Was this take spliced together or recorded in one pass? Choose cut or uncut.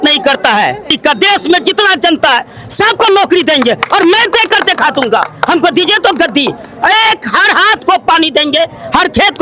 cut